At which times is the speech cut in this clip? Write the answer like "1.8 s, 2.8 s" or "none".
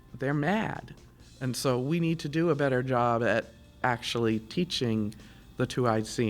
3.8 s